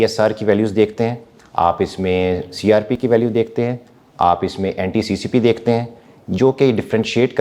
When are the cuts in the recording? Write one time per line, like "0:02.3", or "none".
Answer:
none